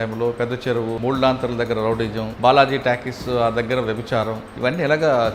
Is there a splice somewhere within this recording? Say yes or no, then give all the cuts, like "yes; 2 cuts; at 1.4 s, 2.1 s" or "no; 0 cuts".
yes; 3 cuts; at 1.0 s, 2.3 s, 4.4 s